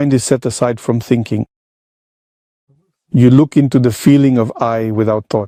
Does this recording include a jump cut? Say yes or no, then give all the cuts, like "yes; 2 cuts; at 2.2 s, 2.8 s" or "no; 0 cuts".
no; 0 cuts